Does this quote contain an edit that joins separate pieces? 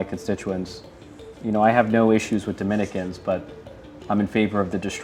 no; 0 cuts

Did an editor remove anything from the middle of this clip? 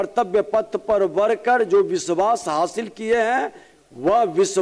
no; 0 cuts

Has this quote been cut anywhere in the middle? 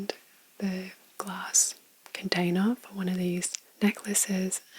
no; 0 cuts

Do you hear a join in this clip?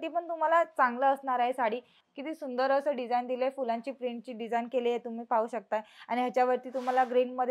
yes; 1 cut; at 2.0 s

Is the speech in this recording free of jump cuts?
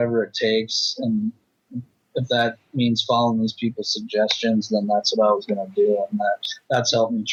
yes; 0 cuts

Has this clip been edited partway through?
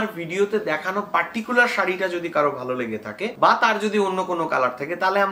no; 0 cuts

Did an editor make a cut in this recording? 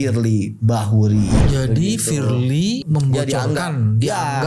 yes; 2 cuts; at 1.4 s, 2.8 s

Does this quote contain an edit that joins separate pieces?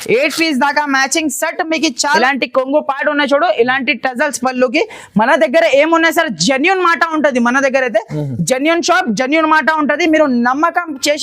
yes; 1 cut; at 2.2 s

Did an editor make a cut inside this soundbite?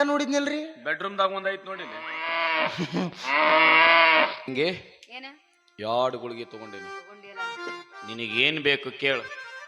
yes; 1 cut; at 4.4 s

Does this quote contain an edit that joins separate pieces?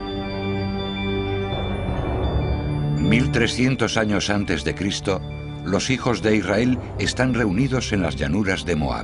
no; 0 cuts

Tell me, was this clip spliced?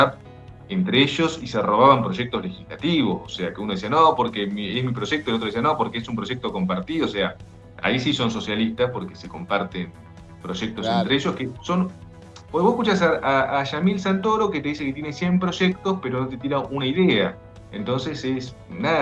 no; 0 cuts

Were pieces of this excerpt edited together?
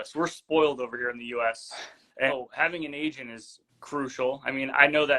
yes; 1 cut; at 2.3 s

